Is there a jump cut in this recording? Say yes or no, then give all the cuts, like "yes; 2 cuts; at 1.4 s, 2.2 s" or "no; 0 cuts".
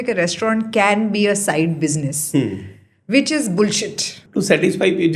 yes; 1 cut; at 4.2 s